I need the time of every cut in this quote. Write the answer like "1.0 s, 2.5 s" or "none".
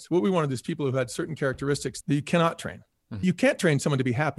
1.9 s, 3.2 s